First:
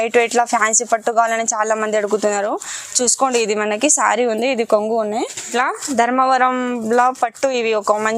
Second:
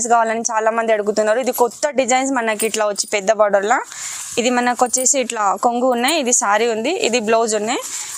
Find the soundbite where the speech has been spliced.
first; 1 cut; at 5.5 s

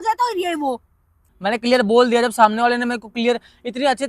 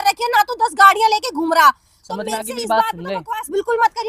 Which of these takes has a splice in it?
first; 1 cut; at 1.3 s

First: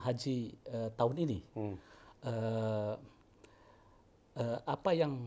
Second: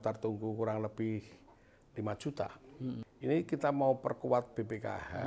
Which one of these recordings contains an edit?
second; 1 cut; at 3.1 s

